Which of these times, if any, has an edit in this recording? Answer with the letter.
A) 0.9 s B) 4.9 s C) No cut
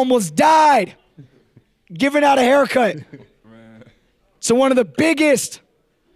C